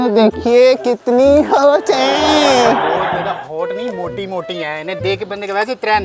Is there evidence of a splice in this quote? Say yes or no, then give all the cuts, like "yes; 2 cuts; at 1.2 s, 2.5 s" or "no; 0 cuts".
no; 0 cuts